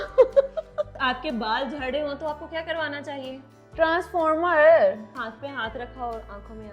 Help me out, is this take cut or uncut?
cut